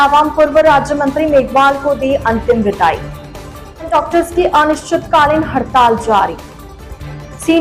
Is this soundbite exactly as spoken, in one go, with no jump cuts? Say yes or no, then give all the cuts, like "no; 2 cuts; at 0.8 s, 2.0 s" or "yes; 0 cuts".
yes; 0 cuts